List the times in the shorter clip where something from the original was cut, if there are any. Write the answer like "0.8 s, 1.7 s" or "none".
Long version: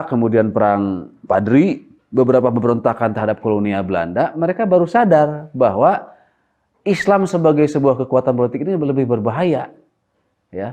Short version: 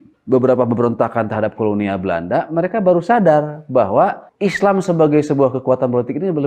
4.3 s